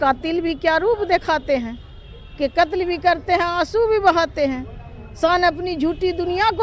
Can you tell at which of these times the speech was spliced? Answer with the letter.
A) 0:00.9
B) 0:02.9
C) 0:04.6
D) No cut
D